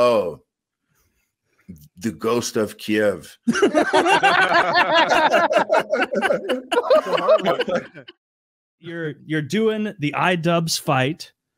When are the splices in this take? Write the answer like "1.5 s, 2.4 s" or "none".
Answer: none